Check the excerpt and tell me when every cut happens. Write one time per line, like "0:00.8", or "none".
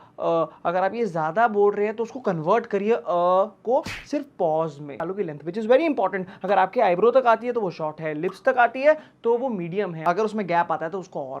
0:05.0
0:10.0